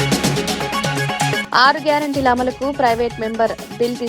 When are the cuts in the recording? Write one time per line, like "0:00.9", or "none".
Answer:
0:01.4